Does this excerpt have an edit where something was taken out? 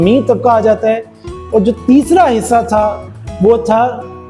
no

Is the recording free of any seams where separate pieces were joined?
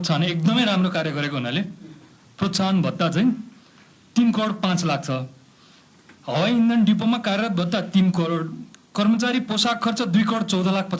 yes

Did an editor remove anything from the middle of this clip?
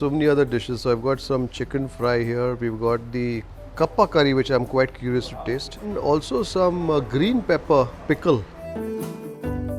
no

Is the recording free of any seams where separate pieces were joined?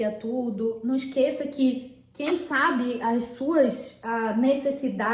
yes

